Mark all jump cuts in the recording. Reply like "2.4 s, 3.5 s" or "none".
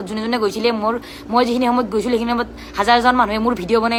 none